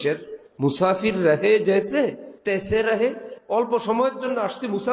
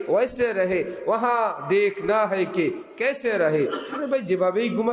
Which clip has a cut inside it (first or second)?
first